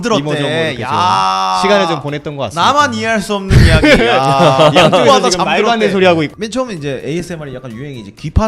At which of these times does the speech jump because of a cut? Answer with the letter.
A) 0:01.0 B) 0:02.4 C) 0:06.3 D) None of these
C